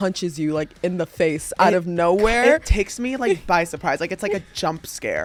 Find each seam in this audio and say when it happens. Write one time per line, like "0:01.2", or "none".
none